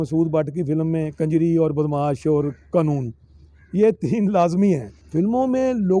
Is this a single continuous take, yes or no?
no